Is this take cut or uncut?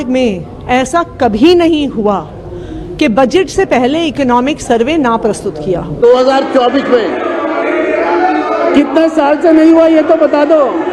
cut